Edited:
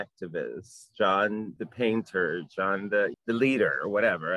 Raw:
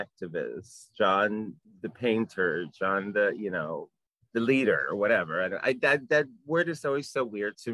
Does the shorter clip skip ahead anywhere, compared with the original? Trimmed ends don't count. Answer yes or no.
yes